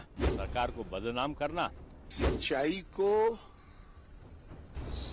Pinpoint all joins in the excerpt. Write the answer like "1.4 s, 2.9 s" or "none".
2.2 s